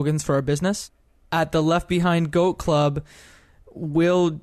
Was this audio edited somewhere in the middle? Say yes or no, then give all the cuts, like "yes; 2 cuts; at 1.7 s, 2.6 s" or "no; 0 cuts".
yes; 1 cut; at 1.2 s